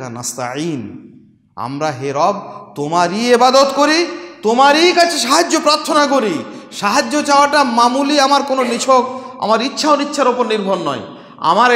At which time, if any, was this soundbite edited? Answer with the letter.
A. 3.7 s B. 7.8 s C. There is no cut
C